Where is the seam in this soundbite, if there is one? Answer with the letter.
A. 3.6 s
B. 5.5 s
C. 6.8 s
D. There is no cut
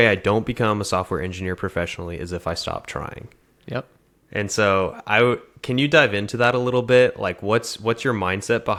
D